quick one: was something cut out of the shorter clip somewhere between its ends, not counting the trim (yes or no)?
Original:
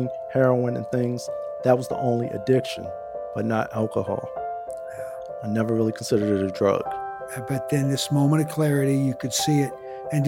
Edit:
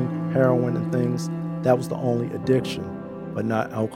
no